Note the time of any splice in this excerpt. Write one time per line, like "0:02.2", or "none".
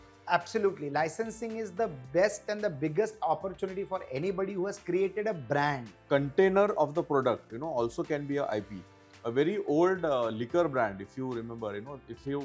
0:05.9